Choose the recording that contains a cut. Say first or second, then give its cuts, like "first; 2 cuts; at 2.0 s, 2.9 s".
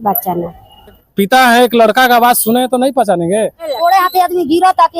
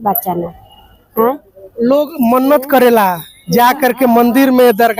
first; 2 cuts; at 1.0 s, 3.7 s